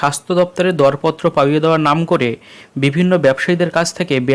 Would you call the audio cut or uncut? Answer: uncut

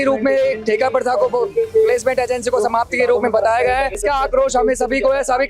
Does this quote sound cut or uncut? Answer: cut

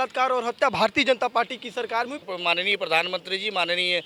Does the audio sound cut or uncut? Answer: cut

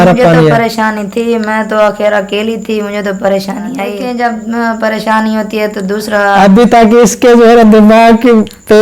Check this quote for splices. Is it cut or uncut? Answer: cut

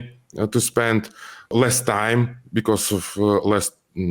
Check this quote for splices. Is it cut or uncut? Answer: cut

